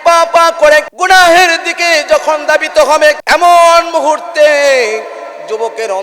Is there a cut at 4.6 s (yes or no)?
no